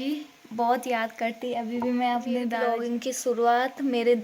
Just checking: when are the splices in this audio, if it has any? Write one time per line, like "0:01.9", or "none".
0:02.9